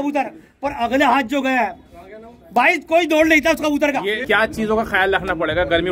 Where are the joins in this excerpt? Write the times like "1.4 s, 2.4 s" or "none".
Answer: 4.2 s